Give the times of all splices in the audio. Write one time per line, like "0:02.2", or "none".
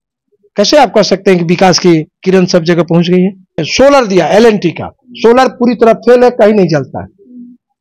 0:03.7